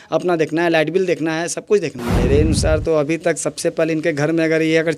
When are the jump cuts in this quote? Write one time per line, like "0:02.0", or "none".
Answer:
0:02.0